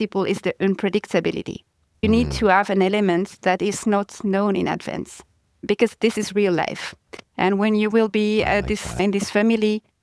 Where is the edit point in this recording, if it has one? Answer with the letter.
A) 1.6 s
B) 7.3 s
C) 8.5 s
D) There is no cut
D